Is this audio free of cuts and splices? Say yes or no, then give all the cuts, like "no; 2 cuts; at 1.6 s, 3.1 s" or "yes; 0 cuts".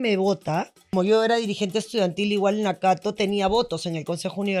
no; 1 cut; at 0.9 s